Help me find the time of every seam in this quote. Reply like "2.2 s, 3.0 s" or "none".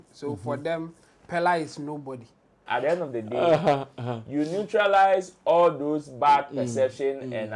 2.6 s

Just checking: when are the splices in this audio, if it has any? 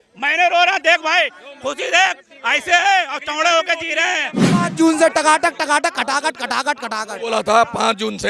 4.5 s

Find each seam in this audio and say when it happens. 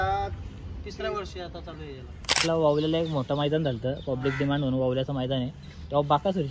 2.4 s

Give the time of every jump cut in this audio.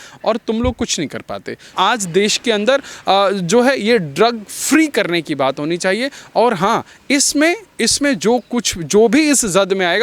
1.7 s

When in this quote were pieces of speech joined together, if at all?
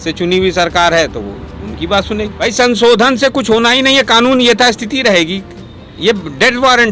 2.3 s

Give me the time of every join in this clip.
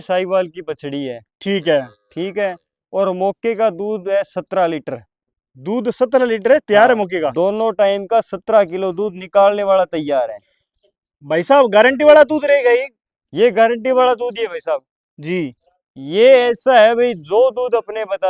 none

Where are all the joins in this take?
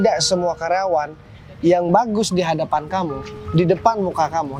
none

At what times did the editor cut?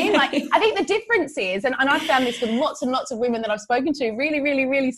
none

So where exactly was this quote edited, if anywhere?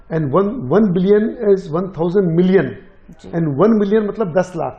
none

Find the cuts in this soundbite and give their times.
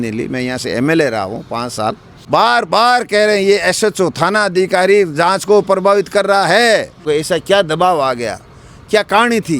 2.1 s, 7.0 s

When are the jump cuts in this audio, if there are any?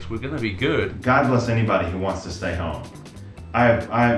0.9 s

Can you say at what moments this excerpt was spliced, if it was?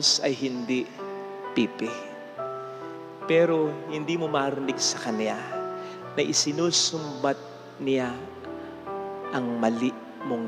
none

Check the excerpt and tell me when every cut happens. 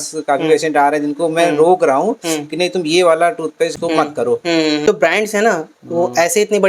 3.7 s, 4.8 s

